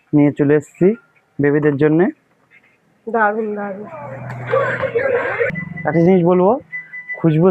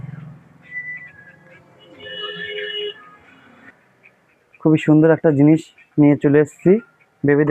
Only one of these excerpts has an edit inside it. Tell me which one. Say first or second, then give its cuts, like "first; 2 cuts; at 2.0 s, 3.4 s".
second; 1 cut; at 4.6 s